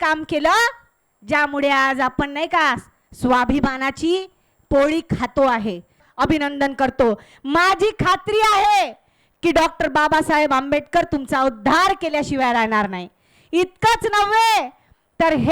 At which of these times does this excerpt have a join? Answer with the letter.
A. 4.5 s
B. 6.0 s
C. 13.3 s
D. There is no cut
B